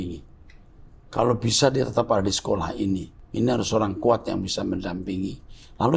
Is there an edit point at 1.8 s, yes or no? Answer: no